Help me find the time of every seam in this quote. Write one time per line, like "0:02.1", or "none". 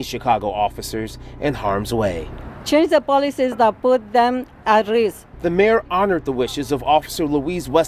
none